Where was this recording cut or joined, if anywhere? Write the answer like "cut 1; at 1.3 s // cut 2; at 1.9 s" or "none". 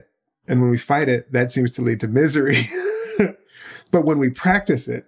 cut 1; at 3.3 s